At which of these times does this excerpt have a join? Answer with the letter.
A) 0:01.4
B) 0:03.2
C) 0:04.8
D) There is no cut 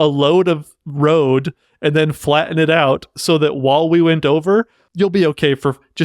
C